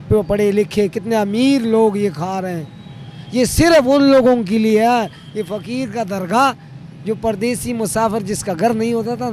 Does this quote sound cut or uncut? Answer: uncut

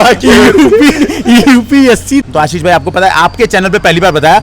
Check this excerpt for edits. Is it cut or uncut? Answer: cut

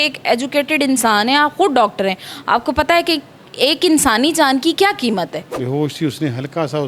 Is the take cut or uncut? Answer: cut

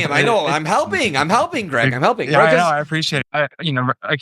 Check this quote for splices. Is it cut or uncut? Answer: cut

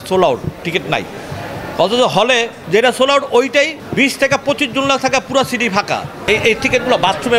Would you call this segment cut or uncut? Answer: cut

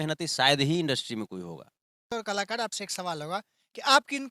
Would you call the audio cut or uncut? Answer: cut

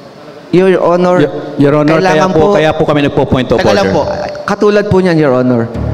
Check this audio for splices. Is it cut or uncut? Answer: uncut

